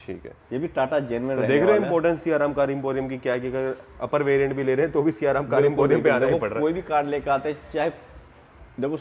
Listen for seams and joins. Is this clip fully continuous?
yes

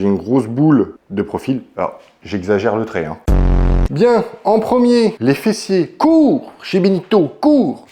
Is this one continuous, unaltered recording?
no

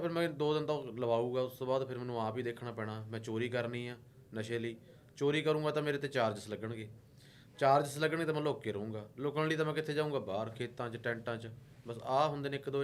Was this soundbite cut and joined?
no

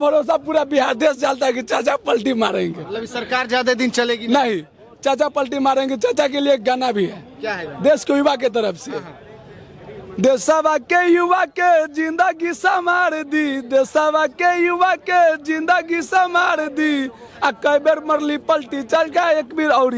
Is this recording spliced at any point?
no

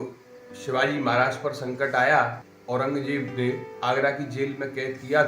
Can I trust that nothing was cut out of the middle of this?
no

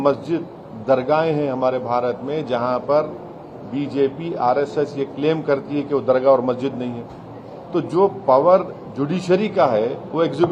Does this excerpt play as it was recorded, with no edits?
yes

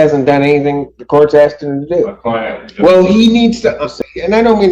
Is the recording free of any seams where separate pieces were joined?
no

